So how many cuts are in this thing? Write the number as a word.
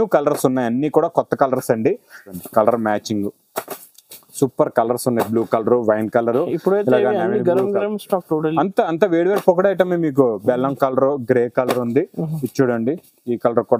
one